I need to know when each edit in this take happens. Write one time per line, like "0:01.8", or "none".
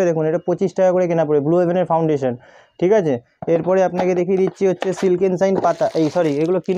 none